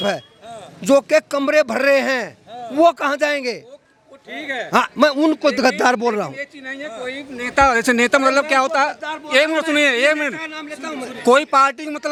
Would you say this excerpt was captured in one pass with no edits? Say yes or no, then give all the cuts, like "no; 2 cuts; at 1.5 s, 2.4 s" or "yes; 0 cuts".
yes; 0 cuts